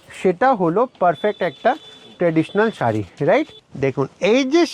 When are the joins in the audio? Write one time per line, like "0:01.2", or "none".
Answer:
0:03.6